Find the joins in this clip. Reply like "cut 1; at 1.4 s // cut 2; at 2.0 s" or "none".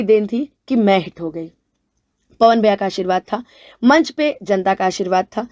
none